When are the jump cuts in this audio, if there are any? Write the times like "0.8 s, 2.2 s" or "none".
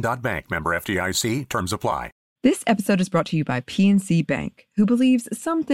2.2 s